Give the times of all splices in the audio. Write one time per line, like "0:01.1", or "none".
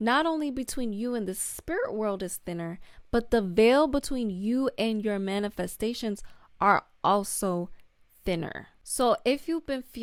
none